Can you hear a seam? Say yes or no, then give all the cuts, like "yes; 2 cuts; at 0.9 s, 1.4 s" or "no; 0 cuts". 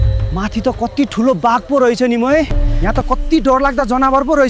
yes; 1 cut; at 2.6 s